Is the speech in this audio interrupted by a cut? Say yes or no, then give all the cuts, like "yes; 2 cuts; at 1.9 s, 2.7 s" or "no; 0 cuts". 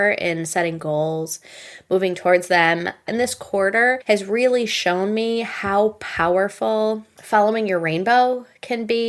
yes; 3 cuts; at 3.0 s, 4.0 s, 7.1 s